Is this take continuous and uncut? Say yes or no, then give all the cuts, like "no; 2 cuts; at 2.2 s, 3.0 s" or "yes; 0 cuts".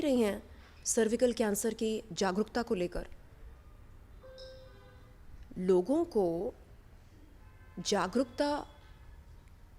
yes; 0 cuts